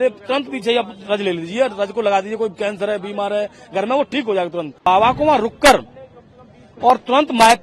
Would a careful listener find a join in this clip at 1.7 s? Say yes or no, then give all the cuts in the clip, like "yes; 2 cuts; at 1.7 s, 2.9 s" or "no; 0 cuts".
no; 1 cut; at 4.9 s